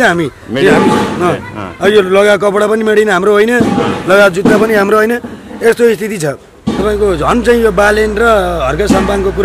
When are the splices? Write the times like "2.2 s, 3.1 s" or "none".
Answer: 6.8 s